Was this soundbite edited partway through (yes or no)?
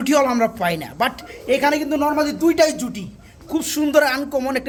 no